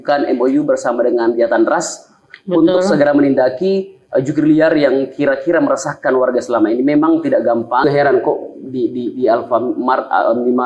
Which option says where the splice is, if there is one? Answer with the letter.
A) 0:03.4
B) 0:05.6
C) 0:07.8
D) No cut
C